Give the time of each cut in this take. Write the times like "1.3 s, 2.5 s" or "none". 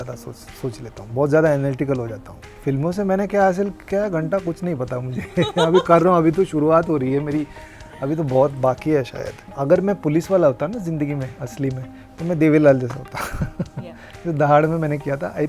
2.5 s, 9.5 s